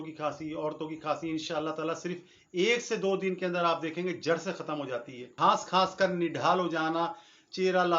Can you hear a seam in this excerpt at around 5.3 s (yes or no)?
yes